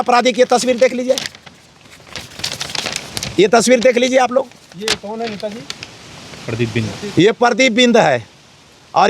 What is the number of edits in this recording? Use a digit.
0